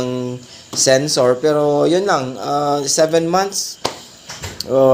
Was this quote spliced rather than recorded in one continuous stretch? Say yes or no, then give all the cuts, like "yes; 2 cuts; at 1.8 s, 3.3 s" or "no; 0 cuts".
no; 0 cuts